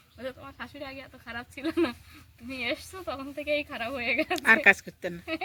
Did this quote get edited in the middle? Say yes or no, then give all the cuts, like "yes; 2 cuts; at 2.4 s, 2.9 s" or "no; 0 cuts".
no; 0 cuts